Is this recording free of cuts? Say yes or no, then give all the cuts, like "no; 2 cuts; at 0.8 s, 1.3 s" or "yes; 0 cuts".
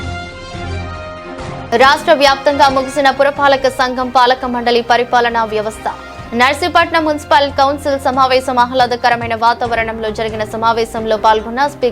no; 1 cut; at 1.2 s